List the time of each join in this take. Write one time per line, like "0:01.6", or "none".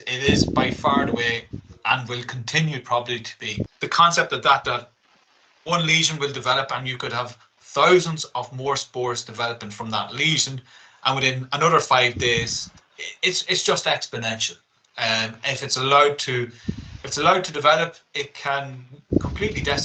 0:03.6